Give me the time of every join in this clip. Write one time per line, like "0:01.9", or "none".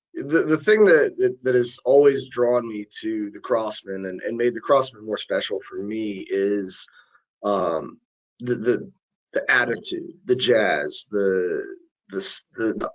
none